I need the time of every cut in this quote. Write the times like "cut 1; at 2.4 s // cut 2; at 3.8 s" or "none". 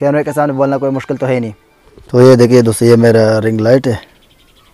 none